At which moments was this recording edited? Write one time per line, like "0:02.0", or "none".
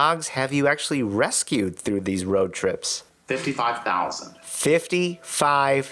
none